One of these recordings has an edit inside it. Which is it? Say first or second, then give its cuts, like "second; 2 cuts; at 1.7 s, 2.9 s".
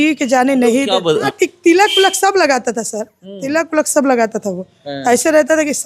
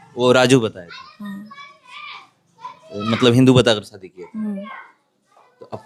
first; 1 cut; at 1.3 s